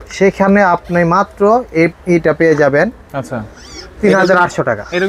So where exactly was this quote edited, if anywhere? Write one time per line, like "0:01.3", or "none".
none